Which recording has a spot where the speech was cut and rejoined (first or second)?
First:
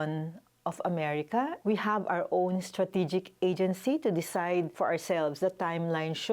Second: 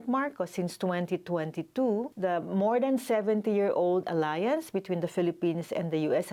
first